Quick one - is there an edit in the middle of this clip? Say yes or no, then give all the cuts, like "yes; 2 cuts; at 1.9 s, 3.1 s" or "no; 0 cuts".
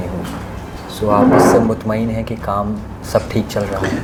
no; 0 cuts